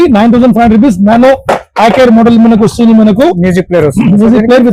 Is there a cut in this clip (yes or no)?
no